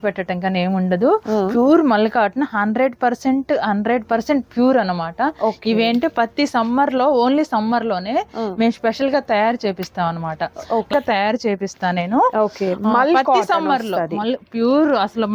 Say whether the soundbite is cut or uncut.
cut